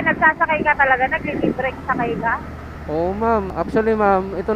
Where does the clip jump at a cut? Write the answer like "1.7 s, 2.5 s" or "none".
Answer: none